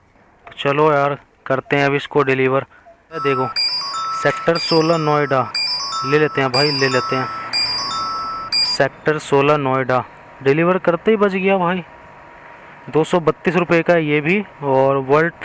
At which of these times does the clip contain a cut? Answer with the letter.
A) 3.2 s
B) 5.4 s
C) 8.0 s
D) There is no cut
A